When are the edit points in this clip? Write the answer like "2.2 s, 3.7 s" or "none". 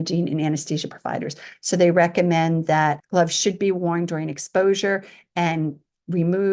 3.0 s